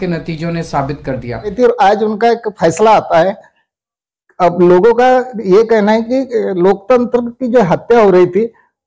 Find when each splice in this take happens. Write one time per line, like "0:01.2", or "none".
0:01.5